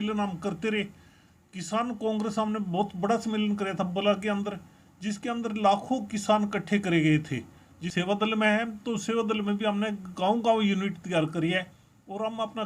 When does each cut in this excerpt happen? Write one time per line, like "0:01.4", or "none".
0:07.9